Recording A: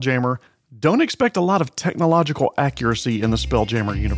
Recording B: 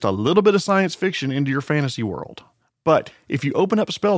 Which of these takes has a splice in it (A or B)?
B